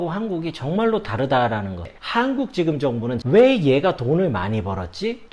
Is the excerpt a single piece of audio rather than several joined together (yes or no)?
no